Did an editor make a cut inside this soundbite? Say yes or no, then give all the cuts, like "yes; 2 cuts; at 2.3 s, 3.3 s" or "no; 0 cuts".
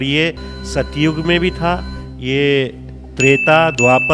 no; 0 cuts